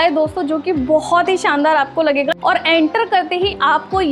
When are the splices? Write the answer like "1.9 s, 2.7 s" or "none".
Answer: 2.3 s